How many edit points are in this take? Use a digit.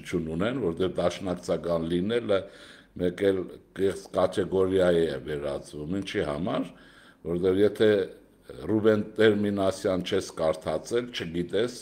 0